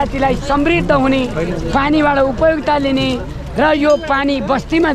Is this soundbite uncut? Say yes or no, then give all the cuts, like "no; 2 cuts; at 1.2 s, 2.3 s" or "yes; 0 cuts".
yes; 0 cuts